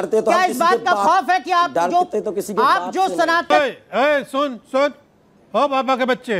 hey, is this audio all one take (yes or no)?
no